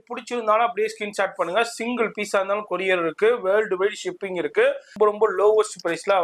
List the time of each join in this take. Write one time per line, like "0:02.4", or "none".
0:04.9